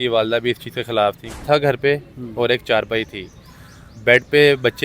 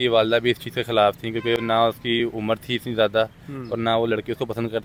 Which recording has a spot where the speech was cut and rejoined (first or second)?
first